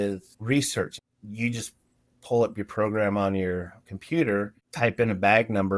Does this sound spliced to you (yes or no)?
yes